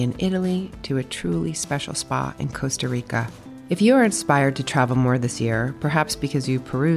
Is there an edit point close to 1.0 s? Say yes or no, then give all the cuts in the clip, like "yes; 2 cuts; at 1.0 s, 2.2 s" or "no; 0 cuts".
no; 0 cuts